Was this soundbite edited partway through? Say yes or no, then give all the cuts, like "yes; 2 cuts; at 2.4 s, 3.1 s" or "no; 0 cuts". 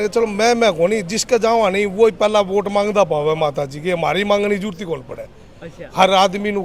no; 0 cuts